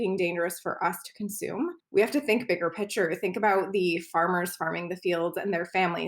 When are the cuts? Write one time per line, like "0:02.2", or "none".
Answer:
0:01.8